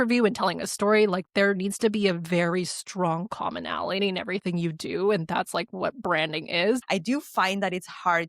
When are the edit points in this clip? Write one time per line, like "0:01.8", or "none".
0:06.8